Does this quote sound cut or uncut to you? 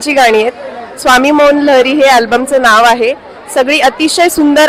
uncut